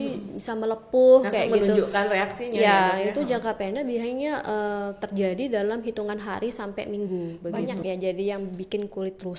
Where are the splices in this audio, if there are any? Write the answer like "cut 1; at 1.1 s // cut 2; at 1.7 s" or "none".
cut 1; at 7.8 s